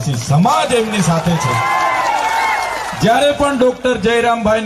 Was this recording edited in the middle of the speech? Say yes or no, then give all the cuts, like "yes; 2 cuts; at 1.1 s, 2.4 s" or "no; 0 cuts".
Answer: no; 0 cuts